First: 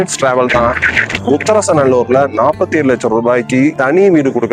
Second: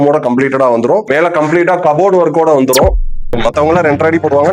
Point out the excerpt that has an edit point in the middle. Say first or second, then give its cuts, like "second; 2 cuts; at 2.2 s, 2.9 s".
second; 1 cut; at 3.0 s